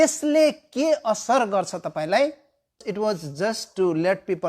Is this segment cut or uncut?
cut